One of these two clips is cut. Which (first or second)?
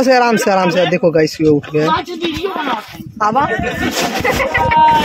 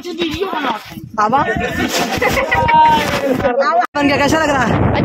second